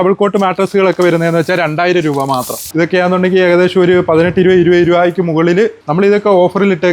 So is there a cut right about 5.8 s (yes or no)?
yes